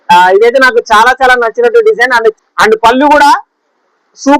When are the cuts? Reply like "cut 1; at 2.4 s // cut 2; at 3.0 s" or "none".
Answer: cut 1; at 2.4 s